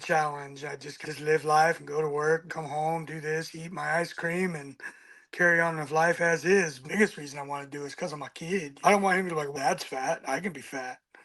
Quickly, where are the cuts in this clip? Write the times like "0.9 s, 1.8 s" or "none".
2.5 s, 6.8 s, 8.7 s